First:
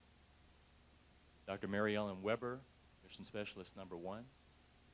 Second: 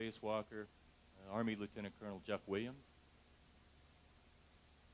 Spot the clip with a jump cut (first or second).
first